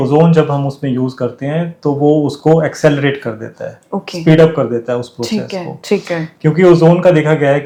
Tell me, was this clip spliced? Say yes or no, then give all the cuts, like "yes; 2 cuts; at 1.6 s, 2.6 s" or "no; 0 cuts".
no; 0 cuts